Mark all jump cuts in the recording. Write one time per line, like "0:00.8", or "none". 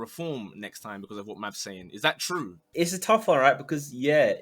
0:02.6